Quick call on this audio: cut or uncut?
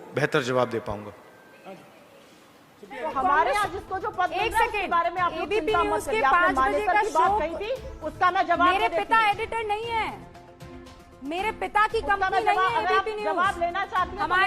cut